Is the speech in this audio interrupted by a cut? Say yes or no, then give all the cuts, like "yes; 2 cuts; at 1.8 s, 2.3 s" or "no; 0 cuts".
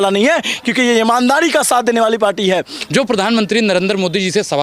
yes; 1 cut; at 2.8 s